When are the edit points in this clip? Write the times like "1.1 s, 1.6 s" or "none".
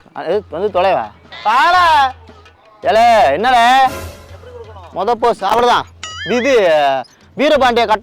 4.1 s